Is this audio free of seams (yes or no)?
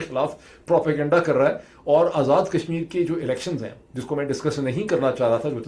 yes